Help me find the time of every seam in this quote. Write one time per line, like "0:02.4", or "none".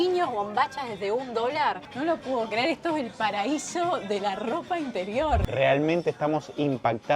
0:05.4